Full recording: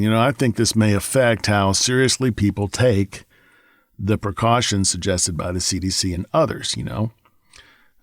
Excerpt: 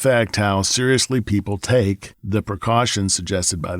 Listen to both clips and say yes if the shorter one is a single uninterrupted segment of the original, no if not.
no